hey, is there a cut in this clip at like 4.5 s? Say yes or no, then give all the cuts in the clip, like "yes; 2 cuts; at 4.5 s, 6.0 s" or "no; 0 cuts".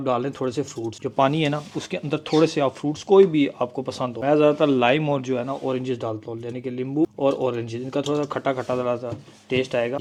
no; 0 cuts